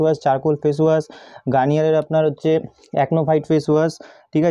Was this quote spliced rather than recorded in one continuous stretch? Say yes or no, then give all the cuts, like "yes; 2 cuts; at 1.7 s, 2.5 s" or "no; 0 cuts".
no; 0 cuts